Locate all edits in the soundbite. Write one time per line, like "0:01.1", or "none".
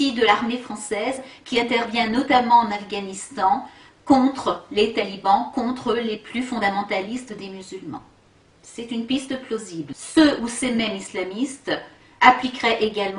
none